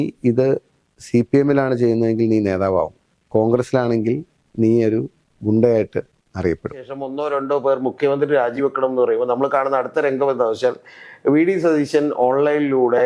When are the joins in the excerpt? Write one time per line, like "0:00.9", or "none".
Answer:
0:07.0